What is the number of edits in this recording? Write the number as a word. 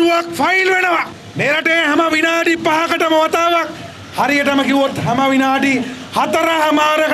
zero